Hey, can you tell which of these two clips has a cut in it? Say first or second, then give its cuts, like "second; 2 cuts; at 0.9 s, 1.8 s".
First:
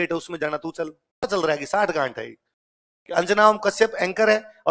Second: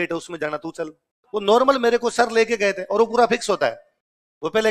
first; 1 cut; at 1.3 s